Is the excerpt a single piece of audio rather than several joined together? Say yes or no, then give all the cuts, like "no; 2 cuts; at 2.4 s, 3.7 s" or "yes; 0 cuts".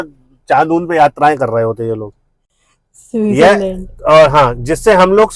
yes; 0 cuts